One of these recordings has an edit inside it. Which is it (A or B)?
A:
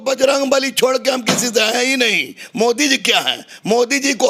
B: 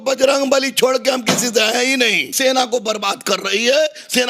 B